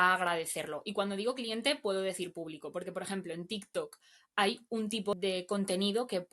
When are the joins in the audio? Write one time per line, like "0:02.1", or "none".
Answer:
0:05.1